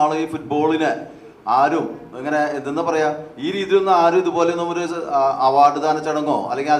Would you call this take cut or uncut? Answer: uncut